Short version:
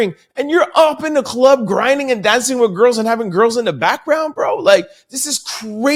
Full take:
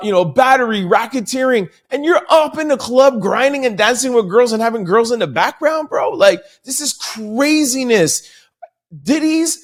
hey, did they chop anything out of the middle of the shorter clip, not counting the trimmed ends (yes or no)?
no